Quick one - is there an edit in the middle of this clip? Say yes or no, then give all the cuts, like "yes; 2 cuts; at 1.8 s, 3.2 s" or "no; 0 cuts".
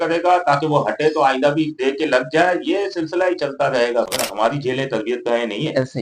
yes; 1 cut; at 4.1 s